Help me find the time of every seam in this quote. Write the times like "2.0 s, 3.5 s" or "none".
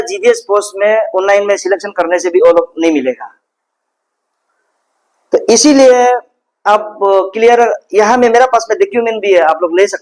none